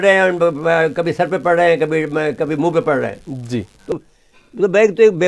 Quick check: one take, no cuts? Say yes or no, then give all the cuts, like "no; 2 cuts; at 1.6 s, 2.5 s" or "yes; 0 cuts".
no; 1 cut; at 3.9 s